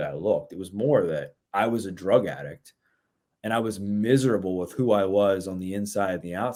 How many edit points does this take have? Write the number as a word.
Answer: zero